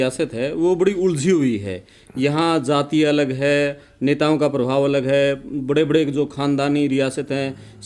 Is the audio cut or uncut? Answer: uncut